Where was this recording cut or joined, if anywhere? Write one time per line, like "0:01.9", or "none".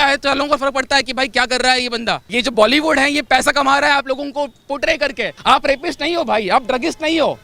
0:02.2
0:05.3